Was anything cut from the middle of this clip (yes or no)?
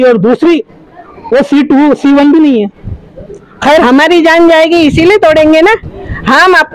yes